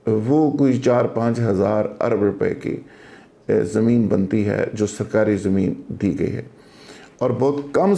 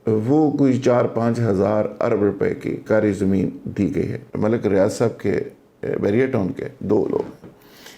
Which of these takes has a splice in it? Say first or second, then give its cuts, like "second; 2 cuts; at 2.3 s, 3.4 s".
second; 2 cuts; at 2.8 s, 4.2 s